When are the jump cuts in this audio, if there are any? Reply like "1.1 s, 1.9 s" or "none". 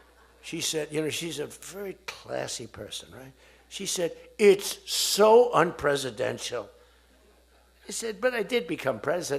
none